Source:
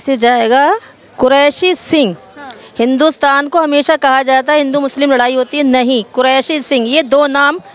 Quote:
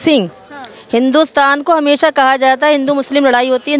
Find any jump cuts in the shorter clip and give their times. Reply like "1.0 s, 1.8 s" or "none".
none